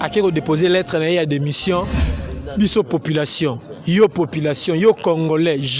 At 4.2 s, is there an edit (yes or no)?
no